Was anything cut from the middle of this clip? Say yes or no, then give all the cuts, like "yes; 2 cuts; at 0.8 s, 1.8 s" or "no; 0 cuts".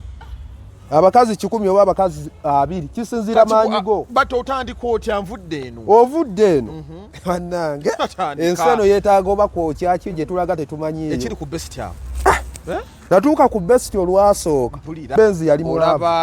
yes; 1 cut; at 15.1 s